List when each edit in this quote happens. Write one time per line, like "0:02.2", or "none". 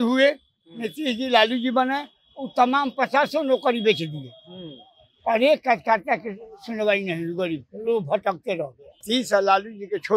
0:09.0